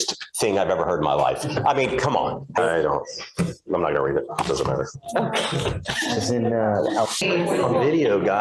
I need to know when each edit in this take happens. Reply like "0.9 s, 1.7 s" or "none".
2.6 s, 7.2 s